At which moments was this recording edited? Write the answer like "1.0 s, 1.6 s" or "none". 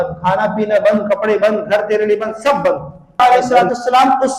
3.2 s

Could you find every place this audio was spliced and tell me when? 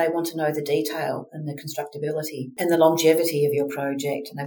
2.5 s

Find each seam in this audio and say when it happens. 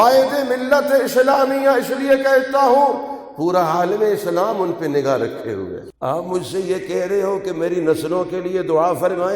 5.8 s

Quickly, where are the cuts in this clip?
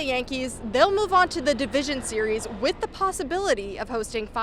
none

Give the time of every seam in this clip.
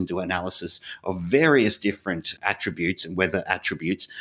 none

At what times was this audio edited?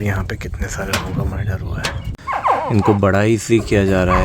2.1 s

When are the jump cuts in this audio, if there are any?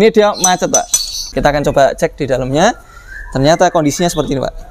1.3 s

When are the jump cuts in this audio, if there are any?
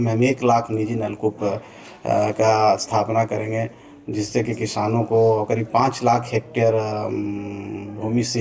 none

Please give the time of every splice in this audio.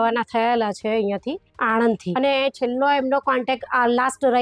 2.1 s

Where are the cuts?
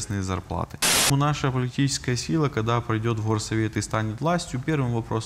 1.1 s

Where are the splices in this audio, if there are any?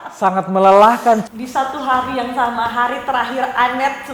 1.2 s

